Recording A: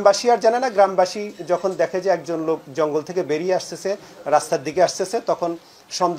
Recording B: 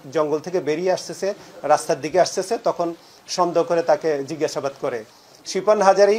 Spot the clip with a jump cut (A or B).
B